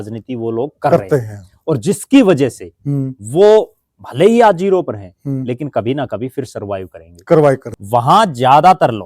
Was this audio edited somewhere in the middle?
yes; 1 cut; at 7.6 s

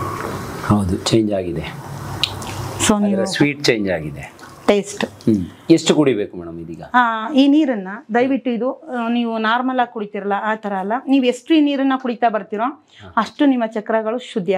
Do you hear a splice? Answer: no; 0 cuts

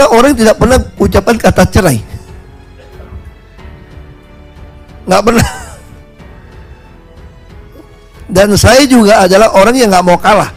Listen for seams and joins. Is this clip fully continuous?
yes; 0 cuts

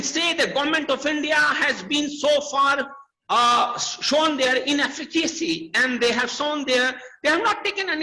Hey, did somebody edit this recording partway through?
no; 0 cuts

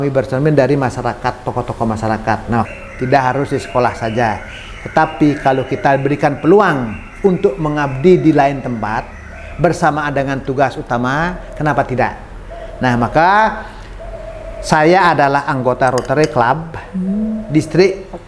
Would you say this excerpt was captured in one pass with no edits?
no; 1 cut; at 2.6 s

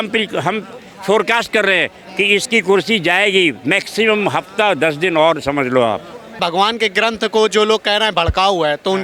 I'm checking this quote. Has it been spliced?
yes; 1 cut; at 6.4 s

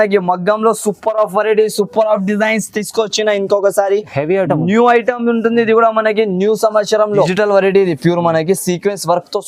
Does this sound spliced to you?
yes; 1 cut; at 7.3 s

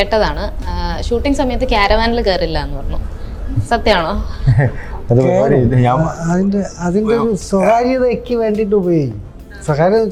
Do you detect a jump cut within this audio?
no; 0 cuts

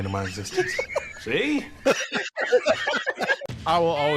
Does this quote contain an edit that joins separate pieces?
yes; 2 cuts; at 1.8 s, 3.4 s

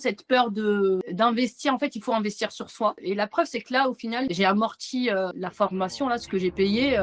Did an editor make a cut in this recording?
no; 0 cuts

